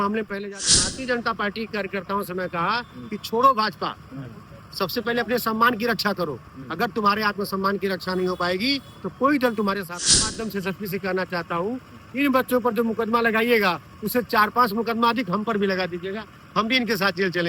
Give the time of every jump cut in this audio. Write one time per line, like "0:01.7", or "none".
0:00.8
0:10.3